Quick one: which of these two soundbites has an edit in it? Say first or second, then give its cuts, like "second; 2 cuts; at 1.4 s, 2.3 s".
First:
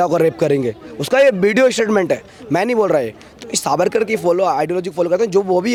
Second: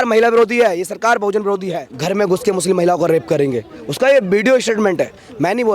second; 1 cut; at 1.9 s